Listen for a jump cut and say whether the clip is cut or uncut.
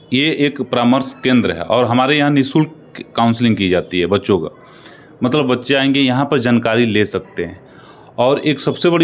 uncut